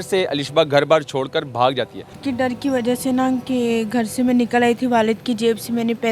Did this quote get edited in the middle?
yes; 1 cut; at 2.2 s

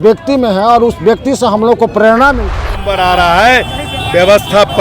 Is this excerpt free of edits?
no; 1 cut; at 2.5 s

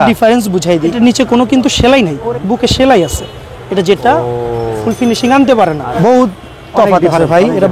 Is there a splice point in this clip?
yes; 3 cuts; at 0.9 s, 2.2 s, 5.9 s

